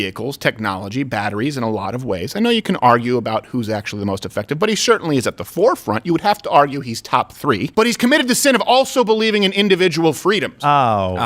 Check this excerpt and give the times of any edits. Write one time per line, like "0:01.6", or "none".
0:07.7